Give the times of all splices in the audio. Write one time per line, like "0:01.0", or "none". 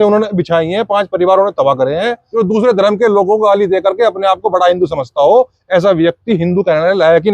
0:02.2